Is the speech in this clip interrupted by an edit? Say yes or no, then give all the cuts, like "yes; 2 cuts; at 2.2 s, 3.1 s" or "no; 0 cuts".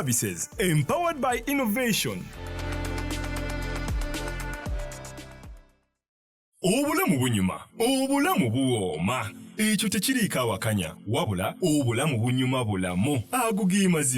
yes; 1 cut; at 6.1 s